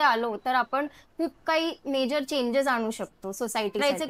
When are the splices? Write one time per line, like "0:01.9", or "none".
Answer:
none